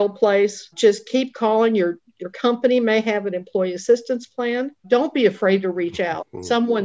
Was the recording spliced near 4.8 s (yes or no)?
yes